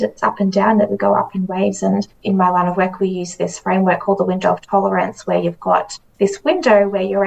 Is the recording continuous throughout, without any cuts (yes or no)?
no